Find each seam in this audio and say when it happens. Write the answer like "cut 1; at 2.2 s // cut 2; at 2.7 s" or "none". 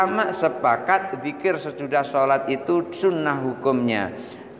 none